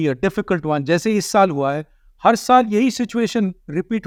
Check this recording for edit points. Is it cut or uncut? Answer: uncut